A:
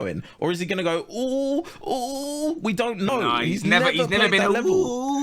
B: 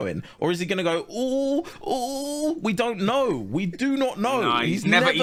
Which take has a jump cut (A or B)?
A